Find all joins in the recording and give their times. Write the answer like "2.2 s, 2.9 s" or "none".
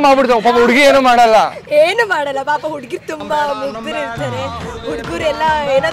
none